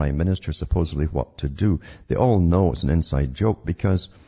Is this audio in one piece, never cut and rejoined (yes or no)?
no